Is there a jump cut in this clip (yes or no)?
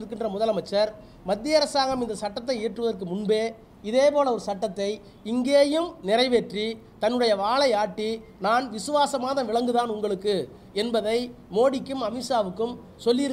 no